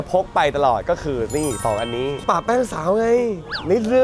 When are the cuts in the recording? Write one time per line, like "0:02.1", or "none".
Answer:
none

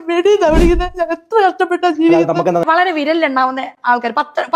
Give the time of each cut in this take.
0:02.6

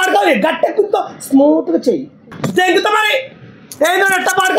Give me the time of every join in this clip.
0:02.3

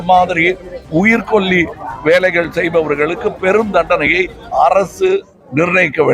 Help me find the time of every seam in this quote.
none

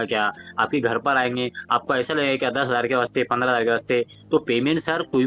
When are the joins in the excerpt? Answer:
none

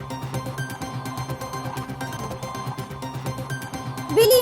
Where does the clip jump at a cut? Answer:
none

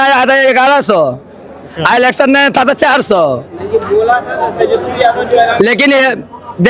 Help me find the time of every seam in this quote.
none

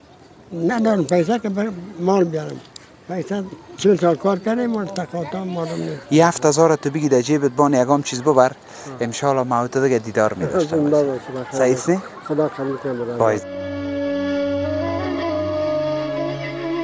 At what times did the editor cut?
0:06.0
0:13.4

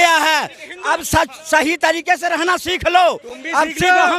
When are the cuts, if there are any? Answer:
none

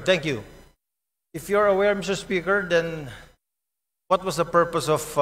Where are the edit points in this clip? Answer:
none

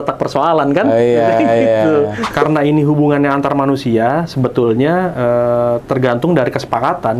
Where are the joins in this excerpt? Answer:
0:02.3

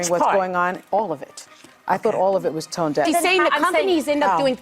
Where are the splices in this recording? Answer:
0:03.1

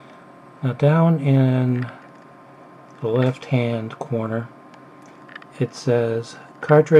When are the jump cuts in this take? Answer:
none

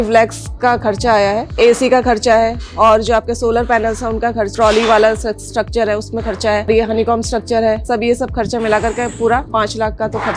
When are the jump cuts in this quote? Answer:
0:01.6
0:04.5
0:06.7
0:09.5

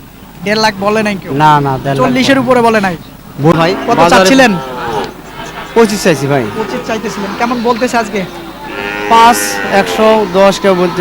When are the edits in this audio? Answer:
0:03.5

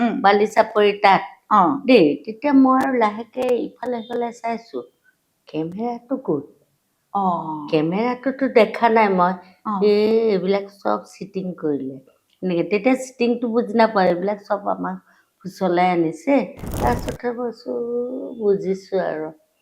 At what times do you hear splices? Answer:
0:16.6

